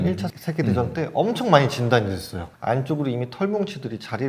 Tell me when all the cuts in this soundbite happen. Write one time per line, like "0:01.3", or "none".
0:02.4

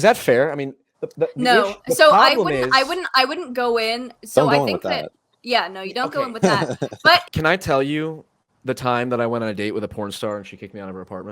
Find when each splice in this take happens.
0:04.1
0:07.3

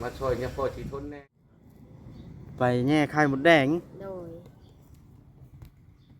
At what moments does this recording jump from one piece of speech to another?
0:01.1

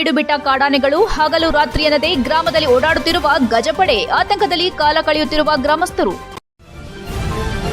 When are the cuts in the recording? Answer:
0:06.3

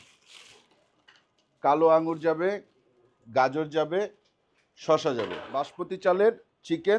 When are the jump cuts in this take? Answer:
0:05.8

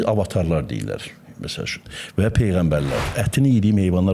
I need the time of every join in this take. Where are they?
0:03.1

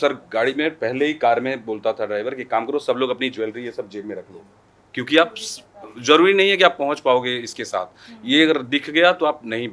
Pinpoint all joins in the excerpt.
none

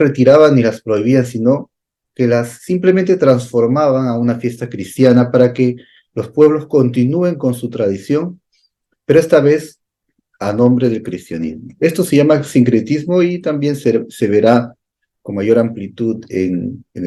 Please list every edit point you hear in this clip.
none

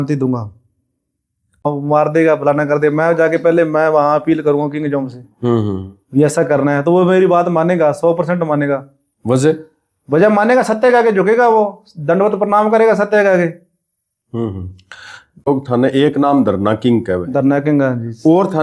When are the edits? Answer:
0:01.7
0:15.4

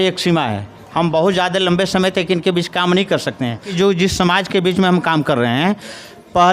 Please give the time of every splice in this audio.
0:03.7

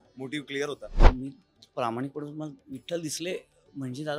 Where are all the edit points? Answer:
0:01.0

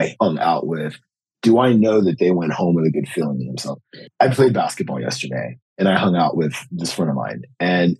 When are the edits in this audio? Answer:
none

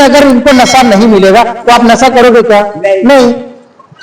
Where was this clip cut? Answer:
none

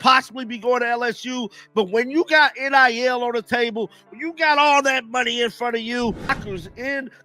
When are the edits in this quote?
0:06.2

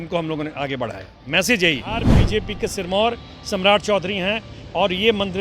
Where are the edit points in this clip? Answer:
0:02.1

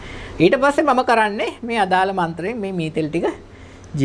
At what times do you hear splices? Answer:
none

